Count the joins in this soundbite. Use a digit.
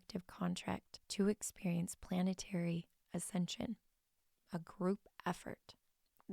1